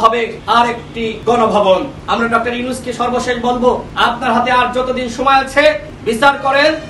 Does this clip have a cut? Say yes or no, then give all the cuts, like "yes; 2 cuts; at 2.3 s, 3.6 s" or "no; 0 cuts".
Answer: yes; 4 cuts; at 0.8 s, 2.0 s, 3.9 s, 5.9 s